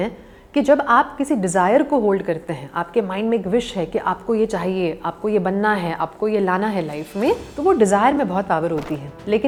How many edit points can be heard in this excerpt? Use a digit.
0